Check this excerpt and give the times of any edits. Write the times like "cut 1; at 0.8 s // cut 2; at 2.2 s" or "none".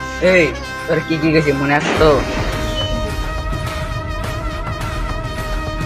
none